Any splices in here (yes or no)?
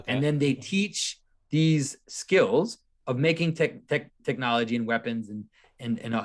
no